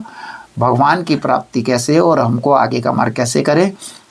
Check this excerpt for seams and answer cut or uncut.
uncut